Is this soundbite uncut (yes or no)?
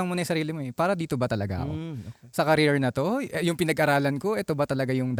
yes